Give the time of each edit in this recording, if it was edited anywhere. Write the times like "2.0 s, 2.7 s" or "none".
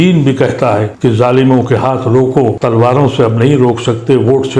0.9 s, 2.6 s